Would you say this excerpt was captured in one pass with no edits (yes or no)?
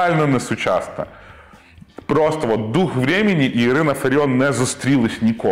yes